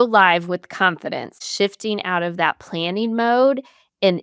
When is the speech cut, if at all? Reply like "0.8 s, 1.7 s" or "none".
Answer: 1.3 s